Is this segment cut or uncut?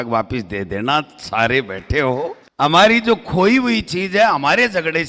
cut